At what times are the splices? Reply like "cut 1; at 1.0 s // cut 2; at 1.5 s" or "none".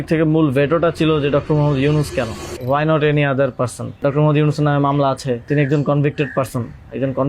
cut 1; at 2.5 s // cut 2; at 4.0 s // cut 3; at 5.5 s